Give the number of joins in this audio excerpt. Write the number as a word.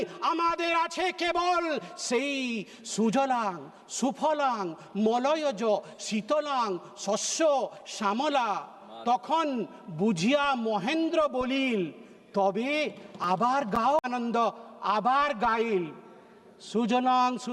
one